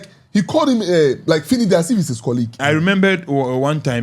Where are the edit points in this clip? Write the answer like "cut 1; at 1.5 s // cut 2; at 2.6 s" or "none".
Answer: cut 1; at 2.6 s